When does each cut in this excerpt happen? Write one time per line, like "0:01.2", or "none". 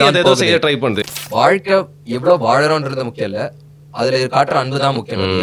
0:01.0